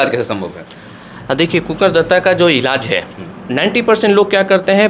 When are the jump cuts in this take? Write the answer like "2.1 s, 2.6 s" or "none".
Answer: 3.4 s